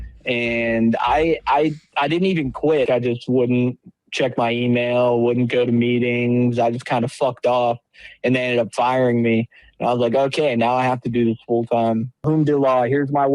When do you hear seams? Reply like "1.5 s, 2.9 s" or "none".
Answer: 2.9 s, 12.2 s